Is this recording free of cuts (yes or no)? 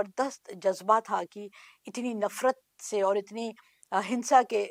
yes